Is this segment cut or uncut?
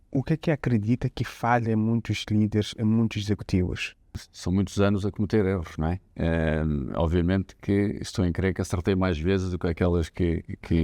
cut